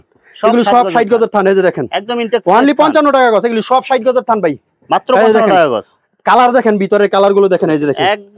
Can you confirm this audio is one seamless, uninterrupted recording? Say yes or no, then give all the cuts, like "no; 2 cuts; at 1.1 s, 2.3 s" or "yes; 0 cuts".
yes; 0 cuts